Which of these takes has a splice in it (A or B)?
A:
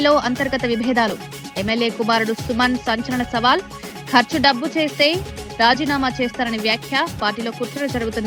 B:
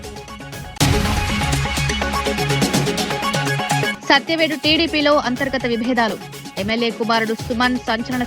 B